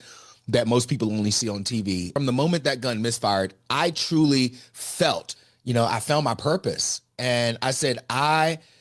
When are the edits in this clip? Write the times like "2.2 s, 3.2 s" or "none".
2.1 s, 5.3 s

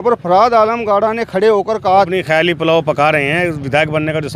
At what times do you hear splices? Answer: 2.1 s

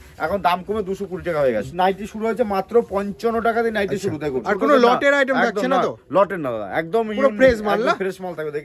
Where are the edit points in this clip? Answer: 1.7 s, 4.4 s

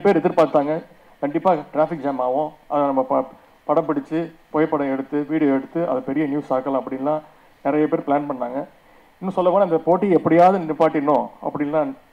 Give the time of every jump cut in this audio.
none

